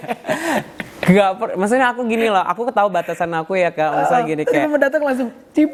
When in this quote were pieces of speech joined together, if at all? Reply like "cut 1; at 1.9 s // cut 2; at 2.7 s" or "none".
none